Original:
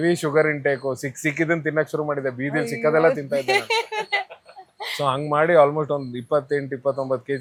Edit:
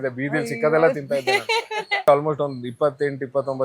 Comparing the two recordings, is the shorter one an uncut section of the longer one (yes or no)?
no